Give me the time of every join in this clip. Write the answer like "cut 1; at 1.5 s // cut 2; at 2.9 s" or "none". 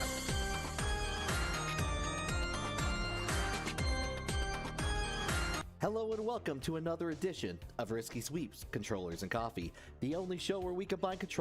cut 1; at 5.7 s